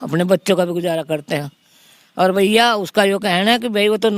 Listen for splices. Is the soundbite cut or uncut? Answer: uncut